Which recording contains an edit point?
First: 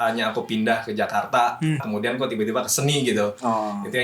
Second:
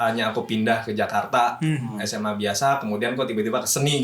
first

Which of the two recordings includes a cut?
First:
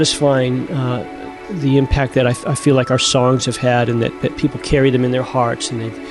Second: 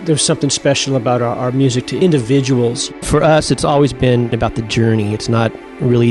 second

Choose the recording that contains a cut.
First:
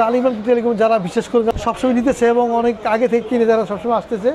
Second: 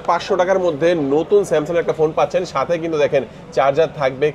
first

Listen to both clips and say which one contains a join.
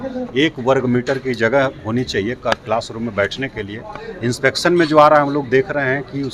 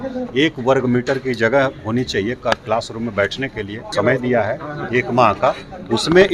second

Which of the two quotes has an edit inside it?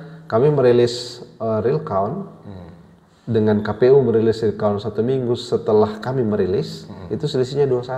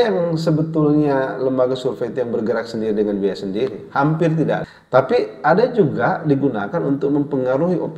second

